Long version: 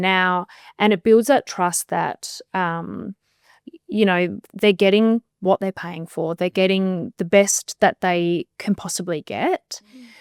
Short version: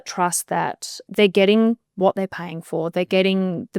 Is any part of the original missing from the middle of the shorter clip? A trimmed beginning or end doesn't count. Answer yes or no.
yes